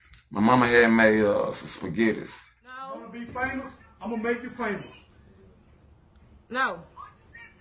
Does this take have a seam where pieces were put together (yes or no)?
yes